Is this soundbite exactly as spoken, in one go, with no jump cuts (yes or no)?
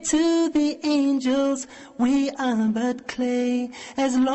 yes